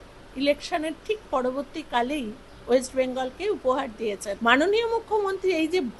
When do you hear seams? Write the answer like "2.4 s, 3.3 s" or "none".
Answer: 4.3 s